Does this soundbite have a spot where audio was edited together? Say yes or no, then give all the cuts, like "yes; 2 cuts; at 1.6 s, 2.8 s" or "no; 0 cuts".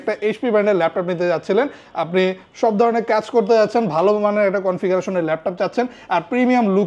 no; 0 cuts